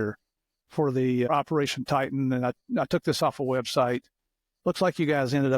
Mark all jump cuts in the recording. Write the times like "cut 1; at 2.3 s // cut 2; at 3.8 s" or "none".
cut 1; at 1.3 s